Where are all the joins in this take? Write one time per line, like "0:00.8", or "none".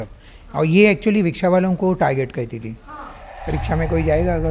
0:02.9